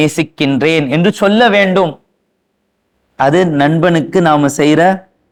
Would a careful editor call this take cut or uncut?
uncut